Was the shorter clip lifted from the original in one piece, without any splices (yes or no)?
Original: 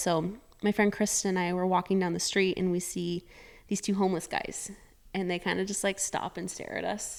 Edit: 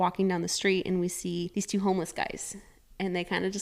no